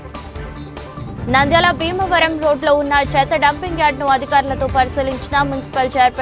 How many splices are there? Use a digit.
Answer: 1